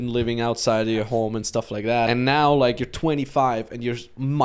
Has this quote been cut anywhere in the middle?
yes; 1 cut; at 2.1 s

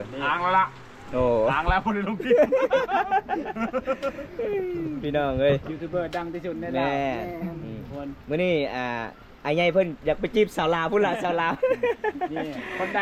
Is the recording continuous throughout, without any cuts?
yes; 0 cuts

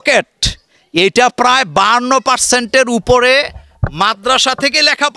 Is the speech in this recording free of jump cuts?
yes; 0 cuts

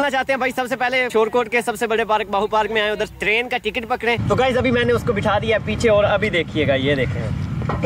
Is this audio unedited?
no; 3 cuts; at 1.1 s, 3.1 s, 4.2 s

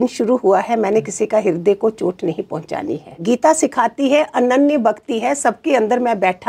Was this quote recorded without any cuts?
yes; 0 cuts

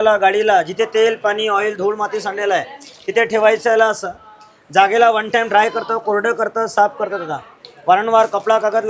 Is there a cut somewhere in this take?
no; 0 cuts

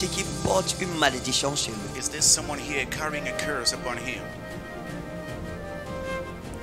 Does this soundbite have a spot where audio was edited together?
no; 0 cuts

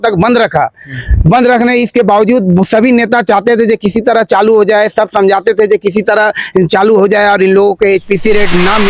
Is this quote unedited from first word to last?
yes; 0 cuts

